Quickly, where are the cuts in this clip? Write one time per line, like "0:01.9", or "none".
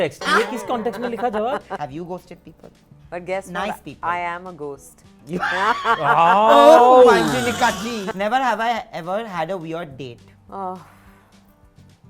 0:01.7
0:08.0
0:10.3